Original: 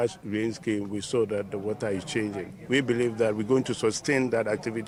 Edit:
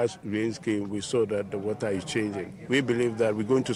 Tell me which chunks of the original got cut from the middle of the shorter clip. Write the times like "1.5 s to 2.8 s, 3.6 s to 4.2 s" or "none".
none